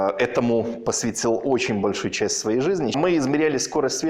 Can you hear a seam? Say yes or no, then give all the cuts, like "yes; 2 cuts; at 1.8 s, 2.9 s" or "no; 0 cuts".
yes; 1 cut; at 3.0 s